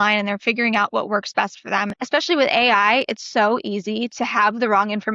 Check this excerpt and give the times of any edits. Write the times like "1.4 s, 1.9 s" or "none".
1.9 s

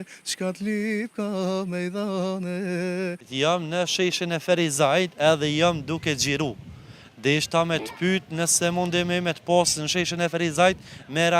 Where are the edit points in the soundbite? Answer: 3.3 s

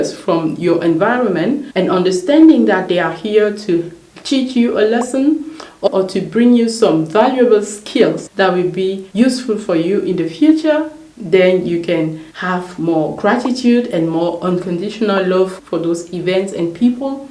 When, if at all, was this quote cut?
1.7 s, 5.9 s, 15.5 s

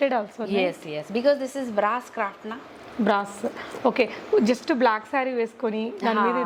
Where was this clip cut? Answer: none

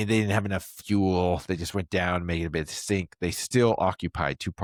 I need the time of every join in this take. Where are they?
none

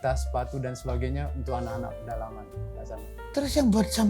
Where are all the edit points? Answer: 3.2 s

